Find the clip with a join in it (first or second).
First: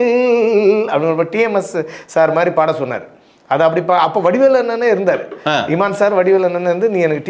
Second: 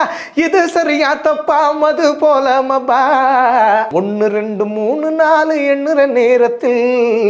second